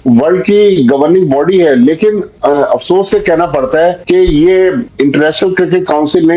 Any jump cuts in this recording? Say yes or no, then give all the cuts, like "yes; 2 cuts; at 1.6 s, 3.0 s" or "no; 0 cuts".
yes; 1 cut; at 4.8 s